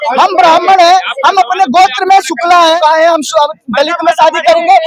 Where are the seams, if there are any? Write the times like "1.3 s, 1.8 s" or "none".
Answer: 2.8 s